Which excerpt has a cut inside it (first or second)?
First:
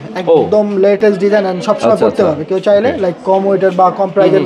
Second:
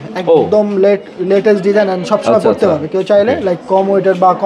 first